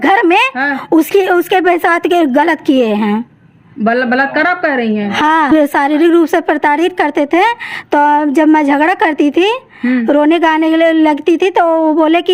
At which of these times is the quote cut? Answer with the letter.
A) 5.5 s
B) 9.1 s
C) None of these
A